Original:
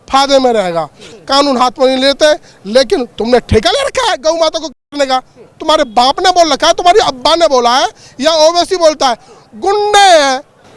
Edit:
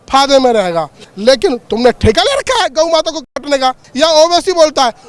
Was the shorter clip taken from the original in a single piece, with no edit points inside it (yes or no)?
no